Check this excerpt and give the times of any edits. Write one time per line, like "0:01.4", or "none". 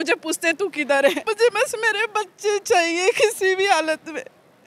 0:01.3